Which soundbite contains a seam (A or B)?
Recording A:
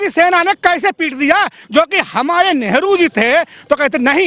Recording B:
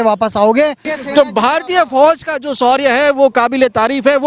B